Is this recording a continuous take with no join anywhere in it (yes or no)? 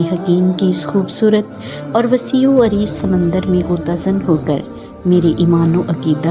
yes